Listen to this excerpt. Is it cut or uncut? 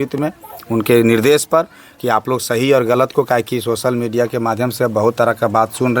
uncut